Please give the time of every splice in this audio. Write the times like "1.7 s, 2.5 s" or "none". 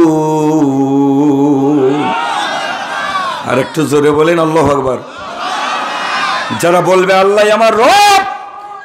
none